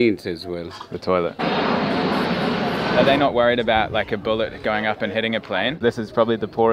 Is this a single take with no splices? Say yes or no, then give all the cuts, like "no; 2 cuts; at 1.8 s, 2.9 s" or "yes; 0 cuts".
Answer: no; 3 cuts; at 1.6 s, 2.9 s, 5.8 s